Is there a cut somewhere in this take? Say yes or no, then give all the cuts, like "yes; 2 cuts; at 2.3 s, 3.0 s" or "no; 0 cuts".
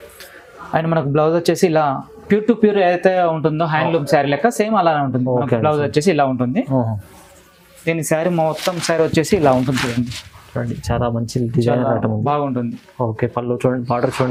no; 0 cuts